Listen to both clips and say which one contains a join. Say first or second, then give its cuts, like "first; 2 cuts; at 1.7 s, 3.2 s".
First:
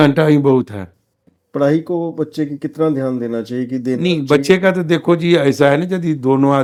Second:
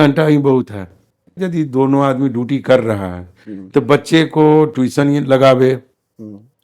second; 1 cut; at 1.4 s